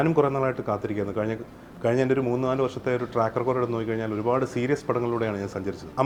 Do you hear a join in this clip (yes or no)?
no